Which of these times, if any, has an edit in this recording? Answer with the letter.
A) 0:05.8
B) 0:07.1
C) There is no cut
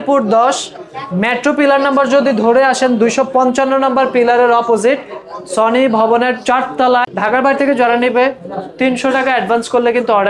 B